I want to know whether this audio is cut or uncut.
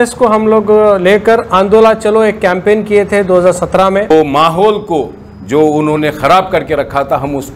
cut